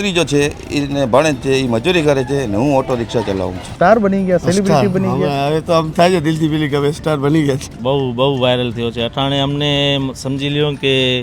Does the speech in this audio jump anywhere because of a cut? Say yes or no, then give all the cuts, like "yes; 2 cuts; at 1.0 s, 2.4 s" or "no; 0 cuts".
yes; 2 cuts; at 3.6 s, 7.8 s